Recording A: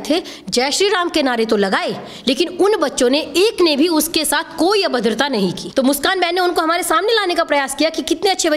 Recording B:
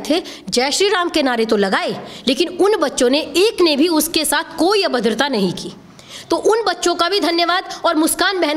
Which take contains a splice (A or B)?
A